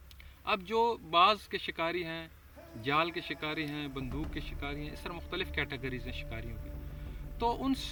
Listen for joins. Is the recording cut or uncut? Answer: uncut